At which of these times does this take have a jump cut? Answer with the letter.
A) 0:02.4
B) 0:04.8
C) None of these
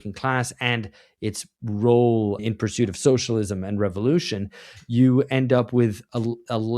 A